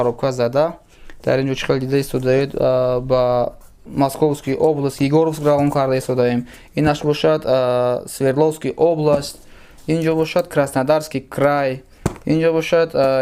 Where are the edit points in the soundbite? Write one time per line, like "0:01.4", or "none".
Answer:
none